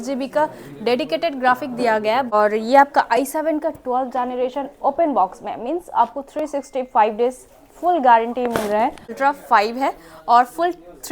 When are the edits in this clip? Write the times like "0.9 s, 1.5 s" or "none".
2.3 s, 9.1 s